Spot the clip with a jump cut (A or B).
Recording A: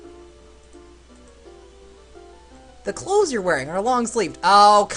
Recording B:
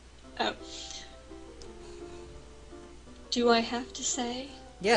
A